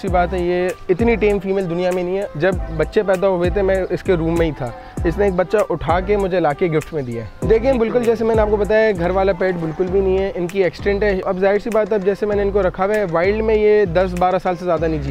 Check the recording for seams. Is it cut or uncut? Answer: cut